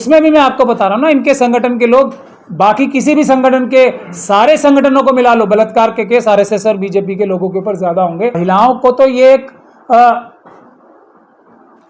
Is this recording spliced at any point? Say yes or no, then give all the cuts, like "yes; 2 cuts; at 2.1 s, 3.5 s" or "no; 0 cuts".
yes; 1 cut; at 8.4 s